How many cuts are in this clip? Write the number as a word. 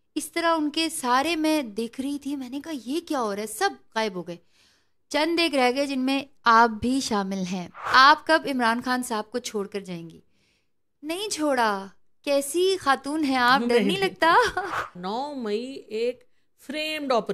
two